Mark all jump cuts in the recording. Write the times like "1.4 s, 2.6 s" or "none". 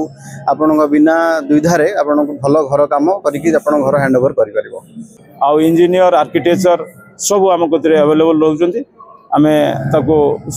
4.9 s